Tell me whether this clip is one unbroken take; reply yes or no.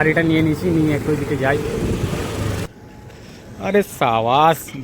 no